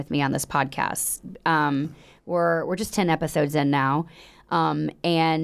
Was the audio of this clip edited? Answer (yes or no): no